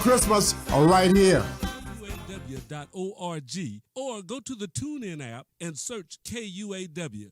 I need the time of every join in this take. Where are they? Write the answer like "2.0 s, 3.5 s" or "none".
2.2 s